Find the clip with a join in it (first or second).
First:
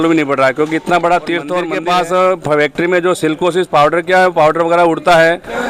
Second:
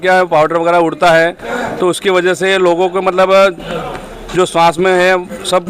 first